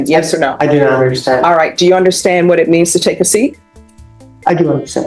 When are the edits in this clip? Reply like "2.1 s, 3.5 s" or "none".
none

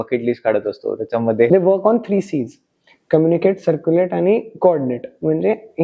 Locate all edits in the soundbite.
1.5 s

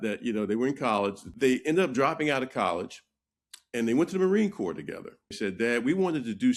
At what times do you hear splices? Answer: 1.2 s, 5.3 s

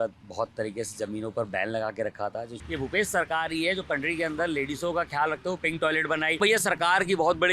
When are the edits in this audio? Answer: 2.6 s, 6.4 s

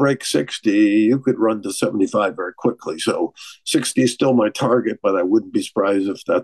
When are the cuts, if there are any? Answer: none

